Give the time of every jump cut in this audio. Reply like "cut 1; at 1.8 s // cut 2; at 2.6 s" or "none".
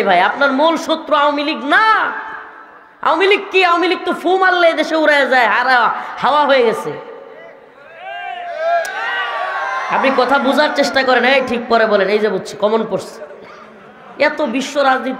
none